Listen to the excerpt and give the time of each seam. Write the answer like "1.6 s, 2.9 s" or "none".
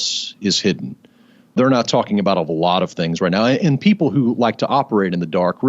1.6 s